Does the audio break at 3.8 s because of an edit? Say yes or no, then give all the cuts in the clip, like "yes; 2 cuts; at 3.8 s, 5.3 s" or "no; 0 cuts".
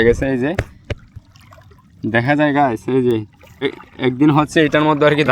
yes; 1 cut; at 3.8 s